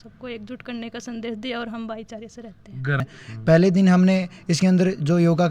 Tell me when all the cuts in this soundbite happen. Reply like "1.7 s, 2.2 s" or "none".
3.0 s